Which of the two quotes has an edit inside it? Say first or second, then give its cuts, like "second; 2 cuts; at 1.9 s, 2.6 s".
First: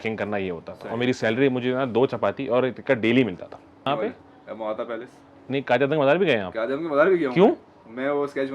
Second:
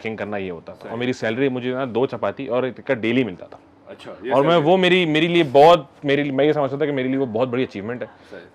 first; 1 cut; at 3.8 s